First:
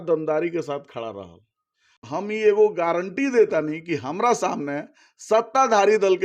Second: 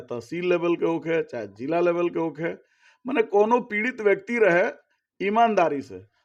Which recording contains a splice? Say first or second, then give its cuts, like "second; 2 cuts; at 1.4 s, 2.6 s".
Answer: first; 1 cut; at 2.0 s